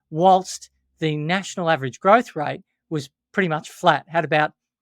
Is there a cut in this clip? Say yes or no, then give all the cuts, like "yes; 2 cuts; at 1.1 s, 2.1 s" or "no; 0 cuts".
no; 0 cuts